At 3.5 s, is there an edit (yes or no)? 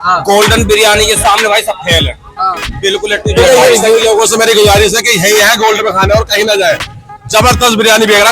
yes